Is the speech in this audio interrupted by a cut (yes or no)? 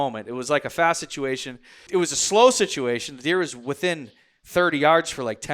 yes